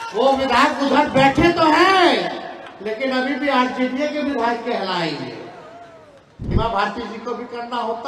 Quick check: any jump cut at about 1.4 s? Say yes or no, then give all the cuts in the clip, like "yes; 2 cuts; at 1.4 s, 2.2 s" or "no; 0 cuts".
no; 1 cut; at 6.5 s